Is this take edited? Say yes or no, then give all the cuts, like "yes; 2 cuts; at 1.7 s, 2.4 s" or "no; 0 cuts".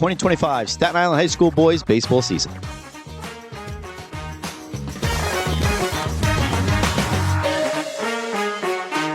yes; 1 cut; at 2.4 s